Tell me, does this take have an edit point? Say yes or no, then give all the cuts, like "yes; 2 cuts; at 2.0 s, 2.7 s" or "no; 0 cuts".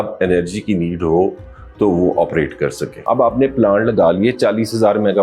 yes; 1 cut; at 2.9 s